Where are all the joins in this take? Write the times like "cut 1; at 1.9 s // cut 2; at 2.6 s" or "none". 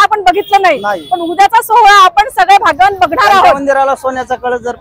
cut 1; at 3.6 s